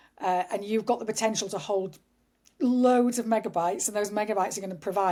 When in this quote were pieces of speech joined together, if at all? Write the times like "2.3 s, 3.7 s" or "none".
none